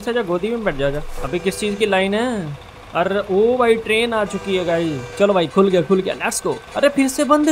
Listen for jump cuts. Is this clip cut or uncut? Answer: cut